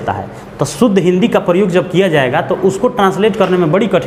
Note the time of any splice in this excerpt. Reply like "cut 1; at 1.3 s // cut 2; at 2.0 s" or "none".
none

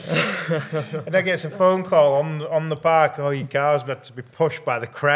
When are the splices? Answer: none

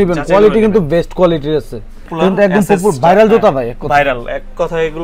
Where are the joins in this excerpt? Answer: cut 1; at 2.1 s

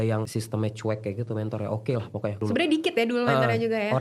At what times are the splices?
cut 1; at 2.4 s

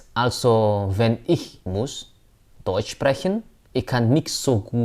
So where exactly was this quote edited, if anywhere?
cut 1; at 1.5 s // cut 2; at 3.6 s

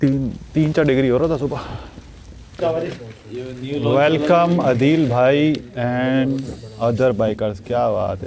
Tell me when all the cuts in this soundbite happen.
cut 1; at 2.6 s

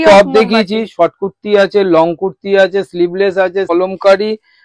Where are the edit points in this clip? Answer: cut 1; at 3.7 s

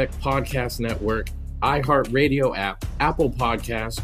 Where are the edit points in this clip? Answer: cut 1; at 1.2 s

